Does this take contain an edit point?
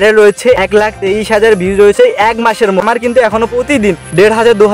yes; 1 cut; at 2.8 s

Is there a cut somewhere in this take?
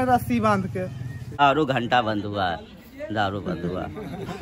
yes; 1 cut; at 1.4 s

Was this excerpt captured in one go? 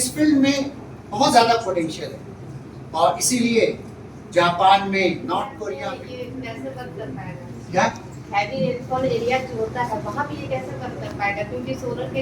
no; 1 cut; at 5.6 s

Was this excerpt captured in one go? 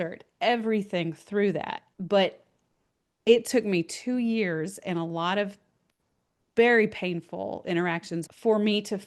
no; 1 cut; at 1.8 s

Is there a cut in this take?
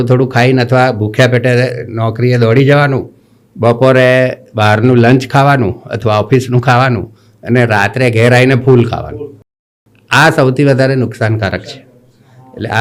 no; 0 cuts

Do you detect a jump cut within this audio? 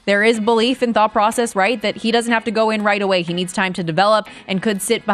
no; 0 cuts

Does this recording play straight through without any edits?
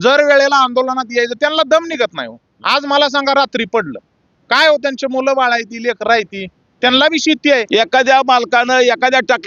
no; 2 cuts; at 2.6 s, 7.7 s

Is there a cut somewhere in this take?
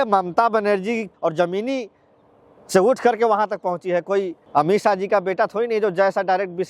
yes; 2 cuts; at 1.1 s, 4.4 s

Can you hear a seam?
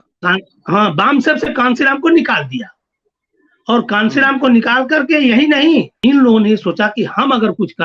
yes; 1 cut; at 6.0 s

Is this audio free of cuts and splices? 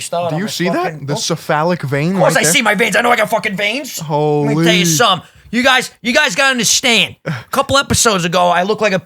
yes; 0 cuts

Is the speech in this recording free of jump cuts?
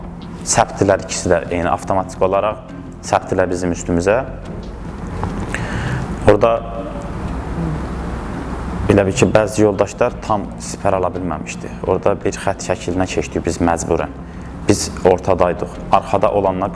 yes; 0 cuts

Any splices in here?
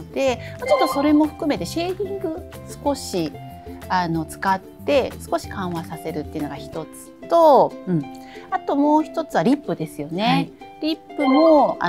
no; 0 cuts

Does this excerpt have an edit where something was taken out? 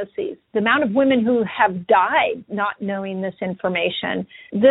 no; 0 cuts

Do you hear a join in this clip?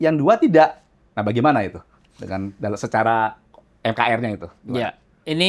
no; 0 cuts

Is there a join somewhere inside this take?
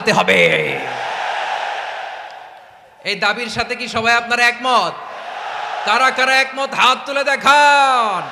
no; 0 cuts

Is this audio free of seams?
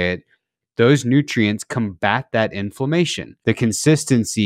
no; 1 cut; at 3.3 s

